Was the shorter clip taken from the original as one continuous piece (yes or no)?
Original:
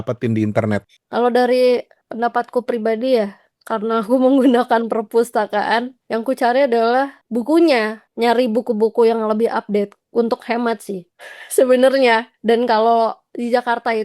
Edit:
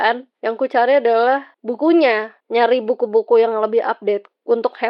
yes